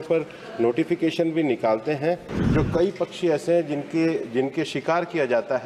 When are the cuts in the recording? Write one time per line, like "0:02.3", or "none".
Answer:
0:02.3

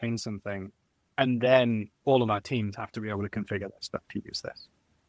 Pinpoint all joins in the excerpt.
0:01.9

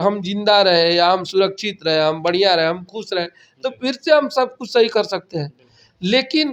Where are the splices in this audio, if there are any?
none

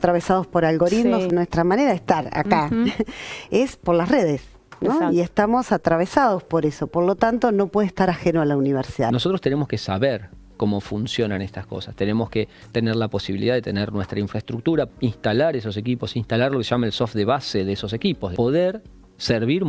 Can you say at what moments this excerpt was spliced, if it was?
0:01.3
0:09.1
0:14.9
0:18.3

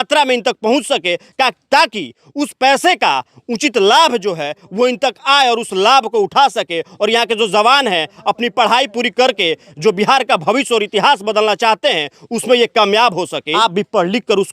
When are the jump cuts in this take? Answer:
0:13.4

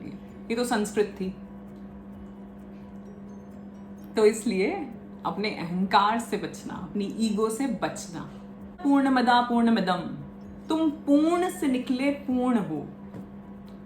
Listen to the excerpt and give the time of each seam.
0:08.8

